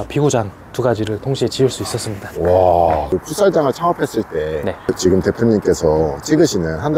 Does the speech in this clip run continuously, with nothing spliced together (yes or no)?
no